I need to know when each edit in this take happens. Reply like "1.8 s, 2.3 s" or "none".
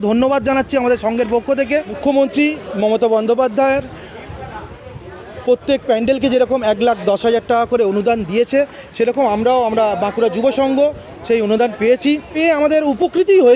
2.0 s, 12.3 s